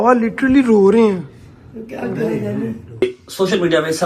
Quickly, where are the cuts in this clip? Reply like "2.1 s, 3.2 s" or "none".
3.0 s